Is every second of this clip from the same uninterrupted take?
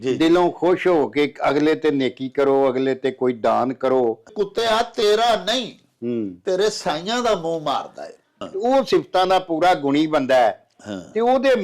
no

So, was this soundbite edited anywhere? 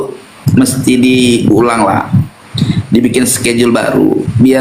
no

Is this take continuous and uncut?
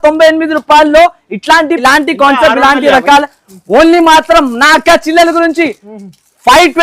no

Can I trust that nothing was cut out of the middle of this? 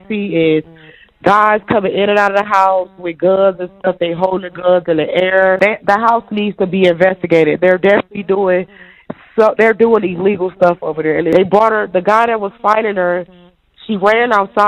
no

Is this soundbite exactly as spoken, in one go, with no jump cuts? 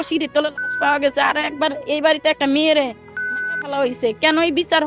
yes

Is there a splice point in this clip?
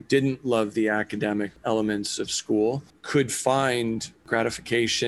yes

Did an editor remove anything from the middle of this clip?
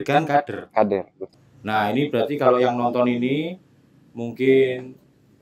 yes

